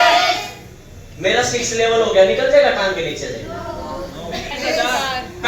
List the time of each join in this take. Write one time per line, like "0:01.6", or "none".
0:04.5